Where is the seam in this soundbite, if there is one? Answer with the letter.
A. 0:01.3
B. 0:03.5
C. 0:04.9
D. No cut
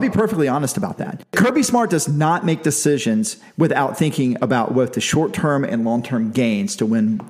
A